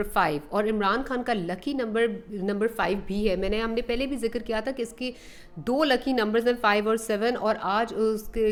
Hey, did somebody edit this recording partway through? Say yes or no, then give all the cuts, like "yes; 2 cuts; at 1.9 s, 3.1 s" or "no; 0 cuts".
no; 0 cuts